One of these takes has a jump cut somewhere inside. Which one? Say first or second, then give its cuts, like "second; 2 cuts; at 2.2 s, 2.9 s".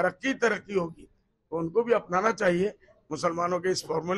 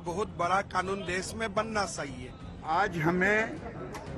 second; 1 cut; at 2.5 s